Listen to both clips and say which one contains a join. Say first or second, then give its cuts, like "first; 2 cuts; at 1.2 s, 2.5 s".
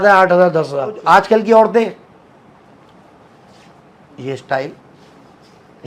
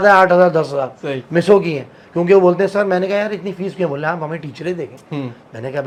first; 1 cut; at 1.0 s